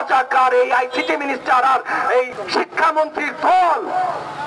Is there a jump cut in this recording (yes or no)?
yes